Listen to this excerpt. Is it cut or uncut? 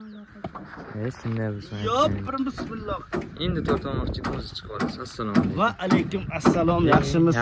cut